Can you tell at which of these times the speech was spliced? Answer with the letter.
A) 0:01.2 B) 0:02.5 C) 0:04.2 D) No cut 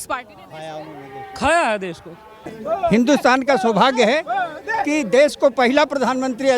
B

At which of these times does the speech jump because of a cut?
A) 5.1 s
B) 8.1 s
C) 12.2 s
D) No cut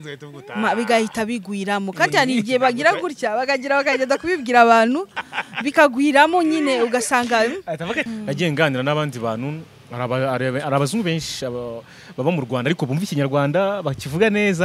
B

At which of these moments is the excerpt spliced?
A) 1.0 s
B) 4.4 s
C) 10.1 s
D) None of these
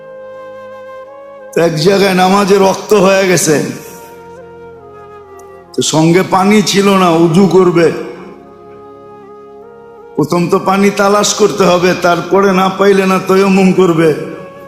A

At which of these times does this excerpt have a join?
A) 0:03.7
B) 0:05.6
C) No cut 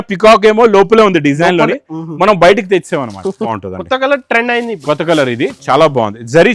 A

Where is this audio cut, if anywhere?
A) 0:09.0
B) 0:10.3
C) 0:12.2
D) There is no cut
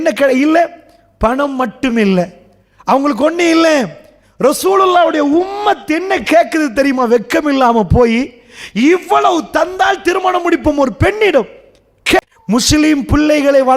C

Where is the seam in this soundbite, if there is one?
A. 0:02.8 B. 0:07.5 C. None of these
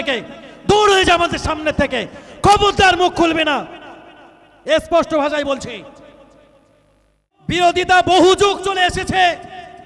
B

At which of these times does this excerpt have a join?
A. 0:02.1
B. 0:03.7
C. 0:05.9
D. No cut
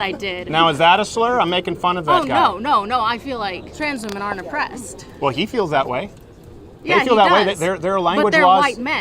B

